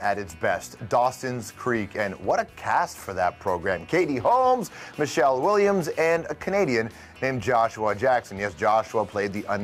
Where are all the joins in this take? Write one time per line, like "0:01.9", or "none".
0:05.8